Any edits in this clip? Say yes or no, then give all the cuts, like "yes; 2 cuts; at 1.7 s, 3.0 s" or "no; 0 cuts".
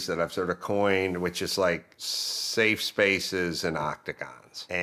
no; 0 cuts